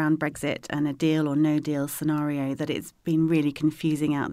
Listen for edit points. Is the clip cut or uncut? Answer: uncut